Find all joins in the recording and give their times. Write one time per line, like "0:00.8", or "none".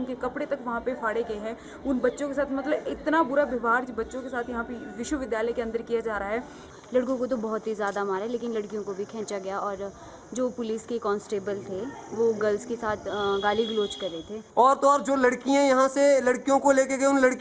0:06.7
0:14.4